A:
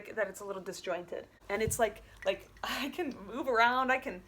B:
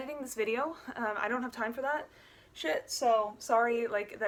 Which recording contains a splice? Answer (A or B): A